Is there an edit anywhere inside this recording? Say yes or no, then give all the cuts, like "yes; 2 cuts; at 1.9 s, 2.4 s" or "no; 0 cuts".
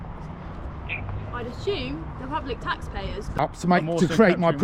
yes; 1 cut; at 3.4 s